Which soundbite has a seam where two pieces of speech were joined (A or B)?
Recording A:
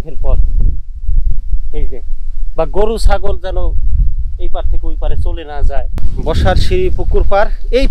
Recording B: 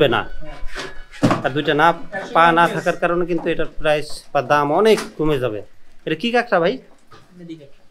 A